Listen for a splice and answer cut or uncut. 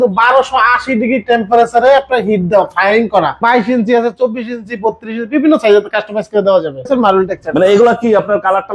cut